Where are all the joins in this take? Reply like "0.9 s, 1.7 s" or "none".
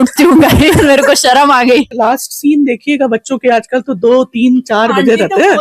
1.9 s

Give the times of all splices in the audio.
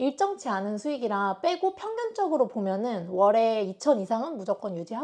none

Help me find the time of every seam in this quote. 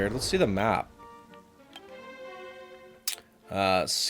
none

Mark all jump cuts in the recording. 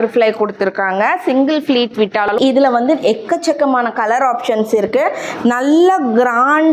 2.3 s

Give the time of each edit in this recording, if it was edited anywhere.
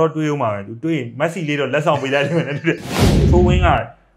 3.2 s

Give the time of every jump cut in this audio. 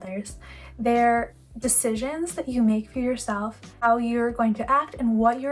3.8 s

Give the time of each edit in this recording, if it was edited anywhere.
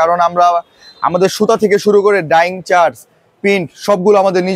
none

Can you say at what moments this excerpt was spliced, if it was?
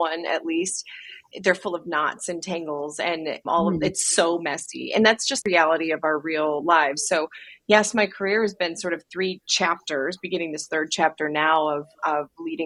none

